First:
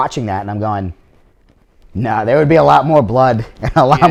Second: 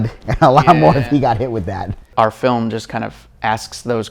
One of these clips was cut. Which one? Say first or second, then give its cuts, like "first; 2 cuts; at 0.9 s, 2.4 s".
second; 1 cut; at 2.0 s